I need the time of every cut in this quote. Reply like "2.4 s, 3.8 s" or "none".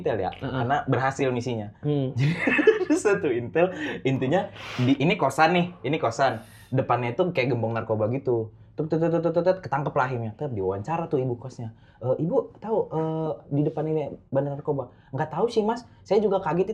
none